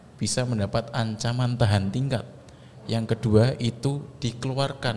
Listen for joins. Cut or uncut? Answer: uncut